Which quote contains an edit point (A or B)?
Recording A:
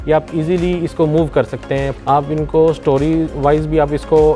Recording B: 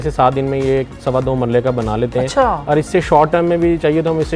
A